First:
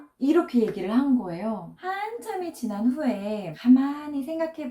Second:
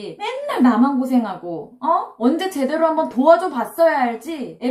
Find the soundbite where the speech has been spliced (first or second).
first